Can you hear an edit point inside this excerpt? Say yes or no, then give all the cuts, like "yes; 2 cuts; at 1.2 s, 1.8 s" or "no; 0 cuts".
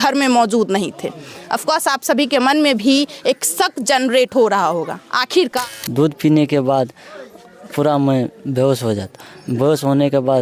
yes; 1 cut; at 5.7 s